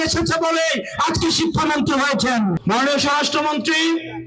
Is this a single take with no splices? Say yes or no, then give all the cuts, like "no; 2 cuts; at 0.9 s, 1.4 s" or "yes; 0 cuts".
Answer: no; 1 cut; at 2.6 s